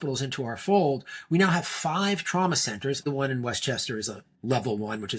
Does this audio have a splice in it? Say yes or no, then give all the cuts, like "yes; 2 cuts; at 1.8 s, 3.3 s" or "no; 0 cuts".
yes; 1 cut; at 3.0 s